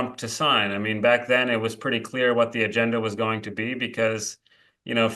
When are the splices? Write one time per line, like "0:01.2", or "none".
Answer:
none